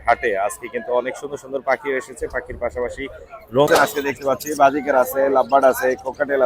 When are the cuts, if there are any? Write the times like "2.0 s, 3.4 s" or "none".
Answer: 3.7 s